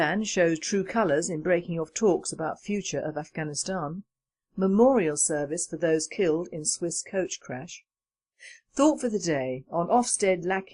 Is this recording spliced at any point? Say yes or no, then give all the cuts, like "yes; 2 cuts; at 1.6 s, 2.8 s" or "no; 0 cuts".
no; 0 cuts